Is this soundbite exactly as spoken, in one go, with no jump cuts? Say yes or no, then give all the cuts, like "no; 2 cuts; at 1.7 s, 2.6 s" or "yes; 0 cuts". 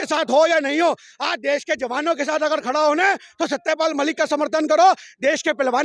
yes; 0 cuts